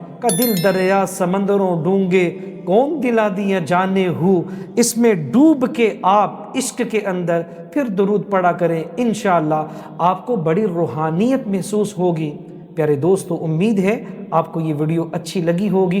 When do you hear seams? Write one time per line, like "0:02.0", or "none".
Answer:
none